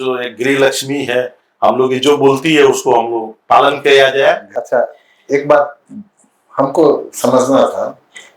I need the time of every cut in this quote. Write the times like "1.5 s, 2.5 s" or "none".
4.5 s

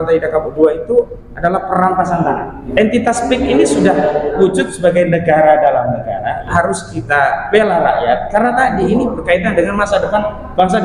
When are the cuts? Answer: 2.6 s, 6.4 s

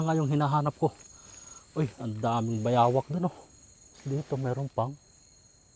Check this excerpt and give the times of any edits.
4.0 s

